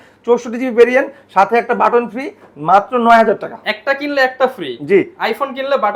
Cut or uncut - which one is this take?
uncut